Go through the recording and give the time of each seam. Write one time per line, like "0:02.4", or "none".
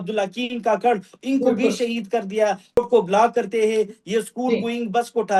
0:02.8